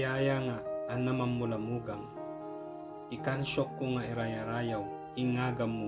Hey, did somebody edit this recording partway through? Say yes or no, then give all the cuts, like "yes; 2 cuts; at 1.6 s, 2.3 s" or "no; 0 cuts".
yes; 2 cuts; at 1.9 s, 3.2 s